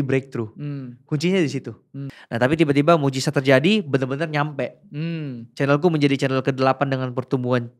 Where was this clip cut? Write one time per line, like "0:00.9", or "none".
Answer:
0:02.0